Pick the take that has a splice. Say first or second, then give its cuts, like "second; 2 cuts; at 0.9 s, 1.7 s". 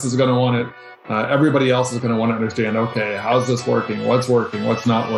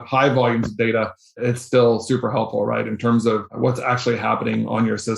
second; 2 cuts; at 1.4 s, 3.5 s